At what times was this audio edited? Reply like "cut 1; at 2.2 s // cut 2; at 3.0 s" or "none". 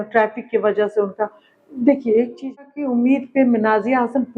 cut 1; at 2.6 s